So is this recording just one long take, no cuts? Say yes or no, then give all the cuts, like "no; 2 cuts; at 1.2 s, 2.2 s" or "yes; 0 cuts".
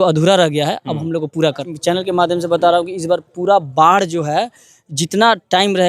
no; 1 cut; at 1.7 s